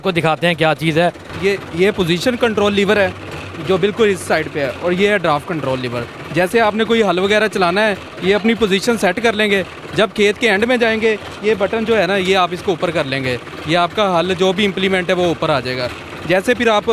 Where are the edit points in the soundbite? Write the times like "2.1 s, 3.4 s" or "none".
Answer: none